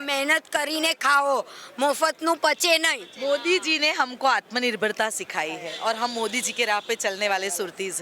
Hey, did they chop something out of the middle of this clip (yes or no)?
no